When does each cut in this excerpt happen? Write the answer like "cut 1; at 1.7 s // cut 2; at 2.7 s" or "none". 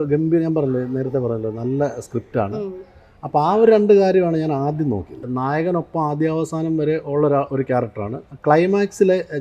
cut 1; at 5.2 s